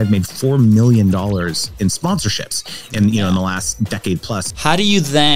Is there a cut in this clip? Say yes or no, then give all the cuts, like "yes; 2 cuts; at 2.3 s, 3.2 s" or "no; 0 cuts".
yes; 2 cuts; at 2.0 s, 4.4 s